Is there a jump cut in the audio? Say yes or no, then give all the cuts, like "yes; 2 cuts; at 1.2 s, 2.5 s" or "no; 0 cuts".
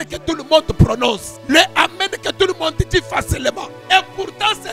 yes; 2 cuts; at 1.3 s, 3.7 s